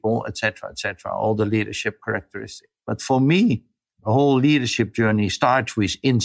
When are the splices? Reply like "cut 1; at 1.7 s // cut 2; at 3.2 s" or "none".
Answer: cut 1; at 3.8 s // cut 2; at 5.3 s